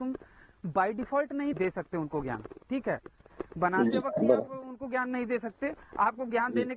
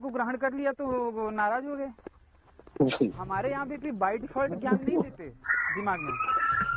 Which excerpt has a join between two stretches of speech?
first; 1 cut; at 1.6 s

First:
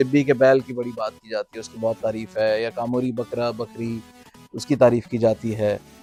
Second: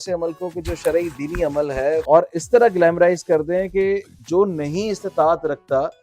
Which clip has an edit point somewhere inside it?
second; 1 cut; at 2.0 s

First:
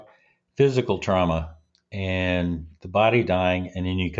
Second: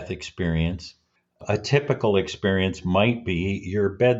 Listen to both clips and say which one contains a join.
second; 1 cut; at 1.4 s

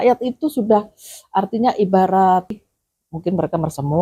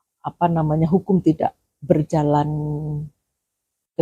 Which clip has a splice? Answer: first; 1 cut; at 2.5 s

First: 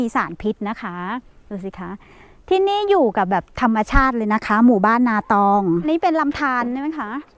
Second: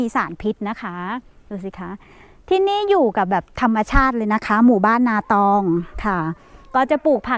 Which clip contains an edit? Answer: first; 1 cut; at 5.8 s

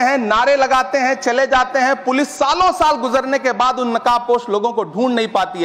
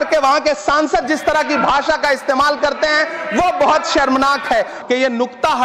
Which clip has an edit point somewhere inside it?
second; 1 cut; at 4.8 s

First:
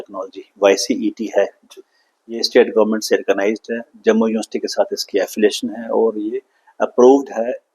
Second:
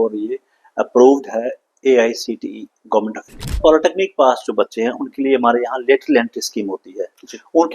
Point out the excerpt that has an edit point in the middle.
second; 1 cut; at 3.6 s

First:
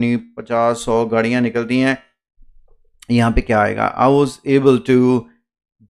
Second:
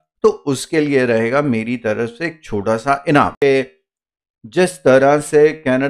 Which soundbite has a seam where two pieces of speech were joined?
second; 1 cut; at 3.3 s

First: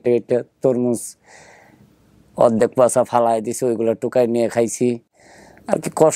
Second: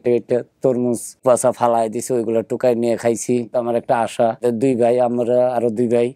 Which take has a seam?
second; 3 cuts; at 1.2 s, 3.5 s, 4.4 s

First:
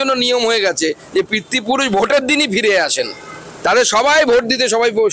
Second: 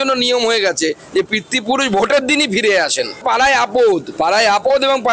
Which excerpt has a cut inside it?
second; 1 cut; at 3.2 s

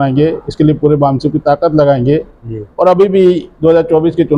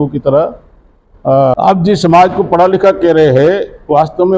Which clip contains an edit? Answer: second; 1 cut; at 1.5 s

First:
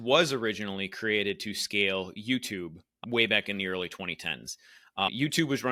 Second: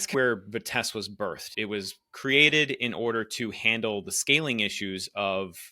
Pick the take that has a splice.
second; 1 cut; at 1.5 s

